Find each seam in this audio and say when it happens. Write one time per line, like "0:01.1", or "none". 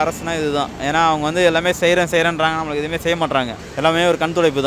0:03.6